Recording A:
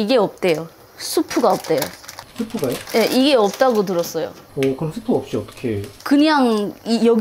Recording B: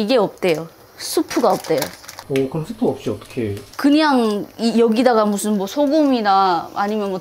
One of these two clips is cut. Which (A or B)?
B